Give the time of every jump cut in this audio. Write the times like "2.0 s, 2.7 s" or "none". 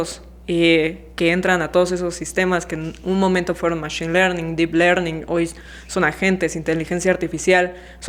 none